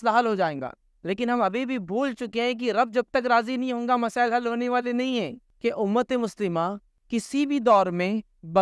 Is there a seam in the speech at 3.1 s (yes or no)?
no